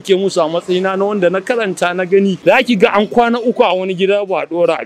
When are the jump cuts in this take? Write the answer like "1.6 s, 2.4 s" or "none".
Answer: 2.4 s

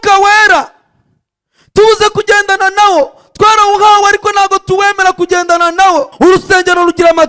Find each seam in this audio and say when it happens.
6.1 s

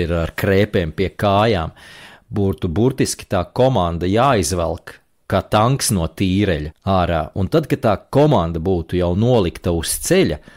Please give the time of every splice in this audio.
5.2 s, 6.7 s

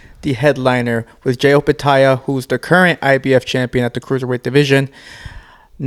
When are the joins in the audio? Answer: none

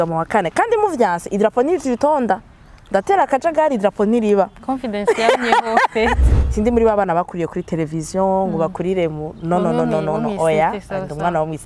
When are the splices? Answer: 6.2 s

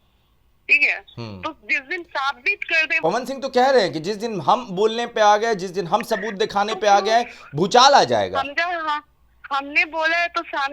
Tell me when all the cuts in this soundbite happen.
3.0 s

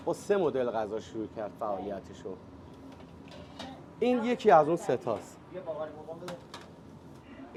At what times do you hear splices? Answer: none

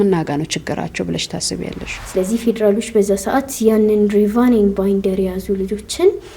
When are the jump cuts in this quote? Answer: 2.0 s

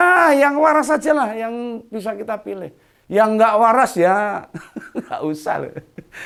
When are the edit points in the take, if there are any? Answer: none

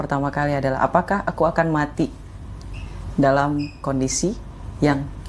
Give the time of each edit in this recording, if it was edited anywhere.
none

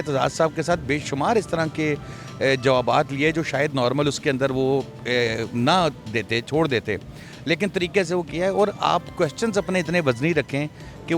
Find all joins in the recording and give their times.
none

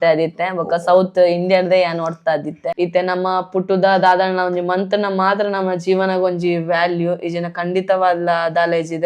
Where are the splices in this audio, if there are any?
2.7 s

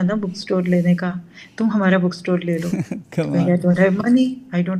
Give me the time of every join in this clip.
none

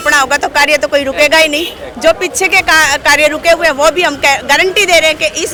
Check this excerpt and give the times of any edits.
none

